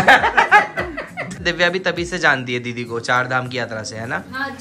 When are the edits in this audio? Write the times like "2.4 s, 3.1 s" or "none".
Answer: 1.4 s